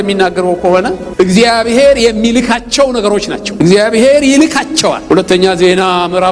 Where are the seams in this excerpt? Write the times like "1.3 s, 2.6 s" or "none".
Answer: none